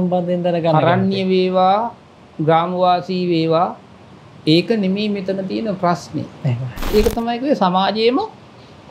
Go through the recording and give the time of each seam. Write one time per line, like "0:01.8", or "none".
0:06.9